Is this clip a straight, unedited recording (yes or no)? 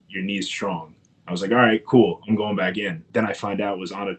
no